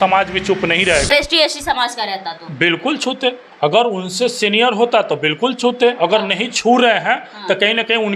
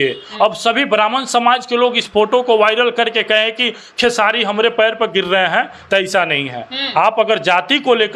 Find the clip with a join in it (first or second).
first